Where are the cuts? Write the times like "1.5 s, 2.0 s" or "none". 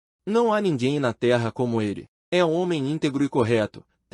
2.1 s